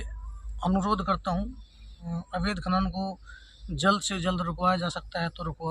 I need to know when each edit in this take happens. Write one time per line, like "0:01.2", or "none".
0:02.1